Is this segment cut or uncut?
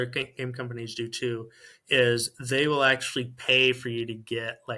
uncut